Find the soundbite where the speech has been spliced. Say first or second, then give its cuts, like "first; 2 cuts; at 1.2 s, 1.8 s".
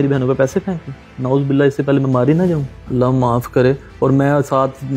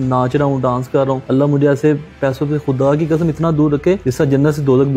second; 2 cuts; at 1.2 s, 4.1 s